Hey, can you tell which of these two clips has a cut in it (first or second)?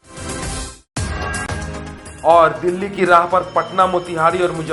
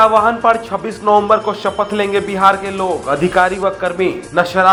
first